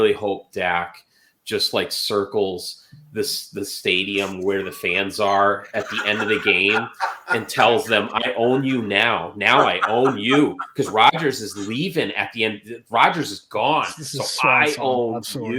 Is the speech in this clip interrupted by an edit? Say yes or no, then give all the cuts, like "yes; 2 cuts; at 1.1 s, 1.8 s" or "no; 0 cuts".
no; 0 cuts